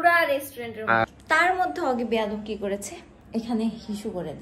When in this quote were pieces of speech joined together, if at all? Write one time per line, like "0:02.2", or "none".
0:01.0